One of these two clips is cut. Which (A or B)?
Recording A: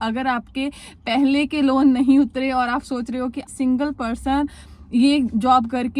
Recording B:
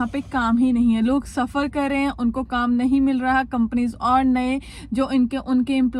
A